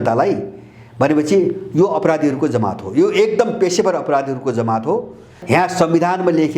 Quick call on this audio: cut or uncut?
cut